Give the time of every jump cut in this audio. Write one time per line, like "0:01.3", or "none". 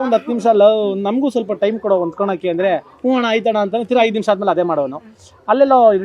none

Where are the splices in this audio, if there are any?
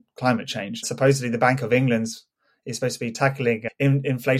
0:00.9
0:03.2

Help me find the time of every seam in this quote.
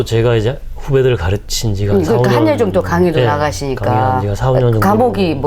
none

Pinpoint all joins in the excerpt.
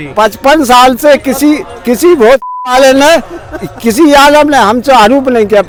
none

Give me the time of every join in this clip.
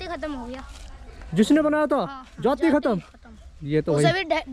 none

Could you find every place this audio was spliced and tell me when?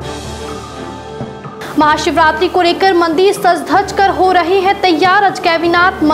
0:01.0

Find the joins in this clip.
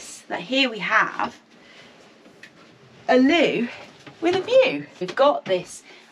0:04.9

